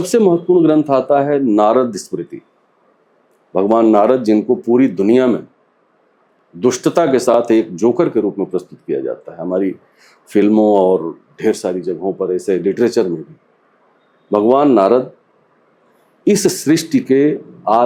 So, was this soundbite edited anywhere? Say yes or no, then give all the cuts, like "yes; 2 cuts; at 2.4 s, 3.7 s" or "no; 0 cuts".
no; 0 cuts